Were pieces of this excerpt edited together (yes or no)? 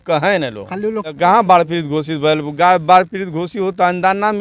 yes